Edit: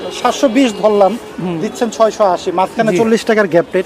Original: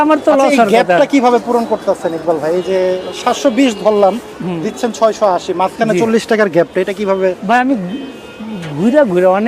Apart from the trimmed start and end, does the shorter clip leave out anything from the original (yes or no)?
no